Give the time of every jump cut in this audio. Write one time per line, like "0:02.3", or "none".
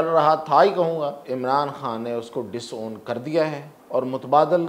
0:01.2
0:03.7